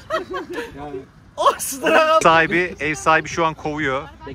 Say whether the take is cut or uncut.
cut